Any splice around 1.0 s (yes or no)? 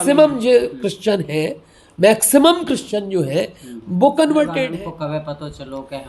no